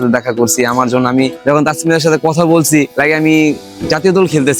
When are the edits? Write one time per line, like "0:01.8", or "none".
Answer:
0:01.4
0:02.9